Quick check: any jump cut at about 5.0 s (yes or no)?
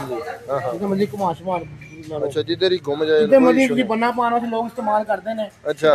no